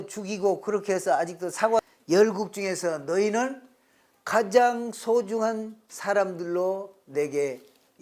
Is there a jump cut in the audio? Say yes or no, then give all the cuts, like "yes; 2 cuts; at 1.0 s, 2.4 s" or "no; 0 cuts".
yes; 1 cut; at 1.8 s